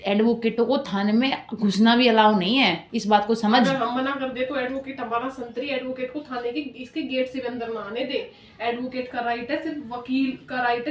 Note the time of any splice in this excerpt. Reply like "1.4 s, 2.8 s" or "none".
none